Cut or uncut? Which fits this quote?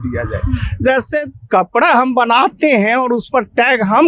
uncut